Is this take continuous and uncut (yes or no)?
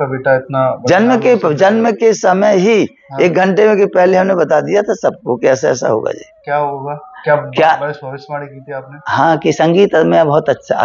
yes